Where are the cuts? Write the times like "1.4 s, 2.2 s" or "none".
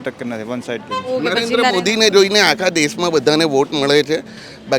1.1 s